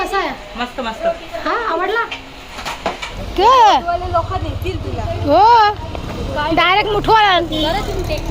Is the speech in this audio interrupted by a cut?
yes; 1 cut; at 3.1 s

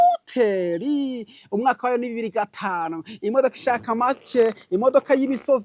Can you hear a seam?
no; 0 cuts

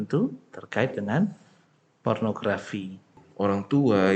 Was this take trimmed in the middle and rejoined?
yes; 1 cut; at 3.2 s

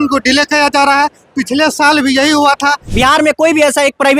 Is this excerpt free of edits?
no; 1 cut; at 2.8 s

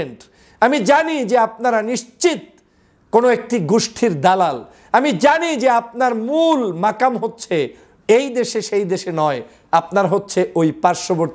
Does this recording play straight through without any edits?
yes; 0 cuts

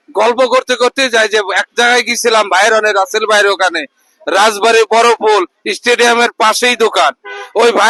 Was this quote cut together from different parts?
no; 0 cuts

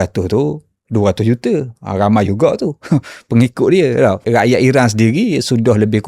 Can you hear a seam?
yes; 1 cut; at 4.2 s

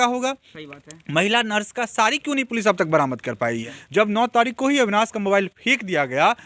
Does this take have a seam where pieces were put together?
yes; 1 cut; at 3.7 s

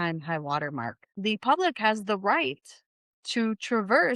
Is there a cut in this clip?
yes; 1 cut; at 1.0 s

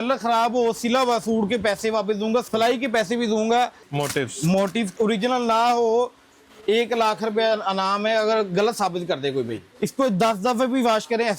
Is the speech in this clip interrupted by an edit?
yes; 4 cuts; at 2.5 s, 3.8 s, 4.9 s, 9.6 s

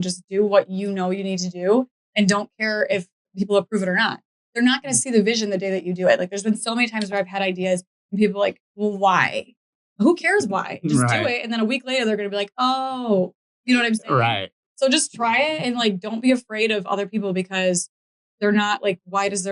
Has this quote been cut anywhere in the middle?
no; 0 cuts

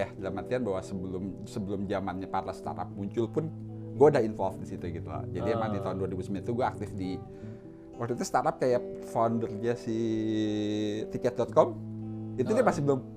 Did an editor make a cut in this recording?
no; 0 cuts

